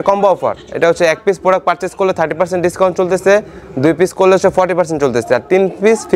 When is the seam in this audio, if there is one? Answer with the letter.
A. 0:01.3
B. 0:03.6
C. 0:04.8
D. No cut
D